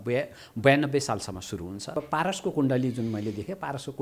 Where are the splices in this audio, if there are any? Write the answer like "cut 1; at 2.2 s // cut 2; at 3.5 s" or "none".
cut 1; at 2.0 s